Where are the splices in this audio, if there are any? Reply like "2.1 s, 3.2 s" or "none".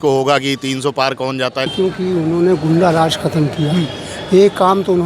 1.7 s

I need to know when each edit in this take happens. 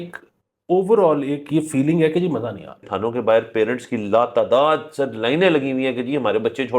2.9 s

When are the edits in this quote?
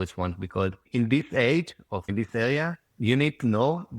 0.9 s, 2.1 s

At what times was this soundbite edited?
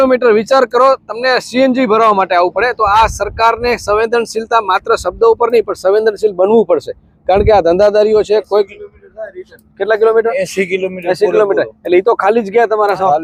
none

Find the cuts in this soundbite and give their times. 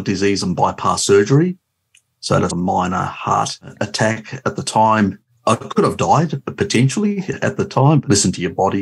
3.8 s, 5.4 s, 8.0 s

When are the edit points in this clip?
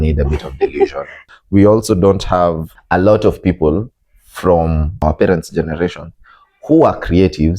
1.2 s, 2.7 s, 5.0 s

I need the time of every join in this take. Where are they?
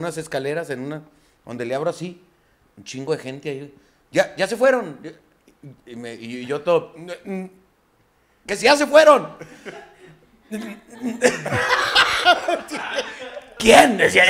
none

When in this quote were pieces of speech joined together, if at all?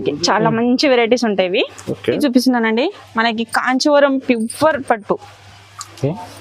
2.2 s

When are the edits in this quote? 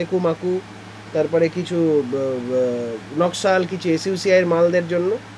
none

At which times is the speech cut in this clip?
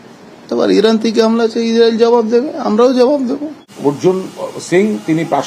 3.8 s

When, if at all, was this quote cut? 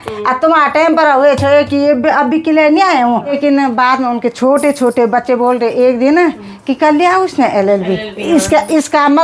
3.4 s

